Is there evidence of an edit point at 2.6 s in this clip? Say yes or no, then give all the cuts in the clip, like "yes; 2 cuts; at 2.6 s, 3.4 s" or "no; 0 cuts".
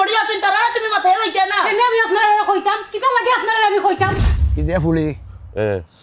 no; 1 cut; at 4.3 s